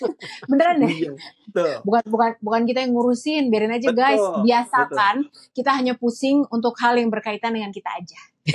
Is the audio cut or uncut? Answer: uncut